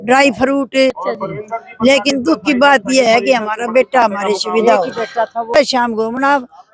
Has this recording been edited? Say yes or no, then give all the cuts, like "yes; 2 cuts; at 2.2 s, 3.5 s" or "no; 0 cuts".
yes; 2 cuts; at 1.0 s, 5.6 s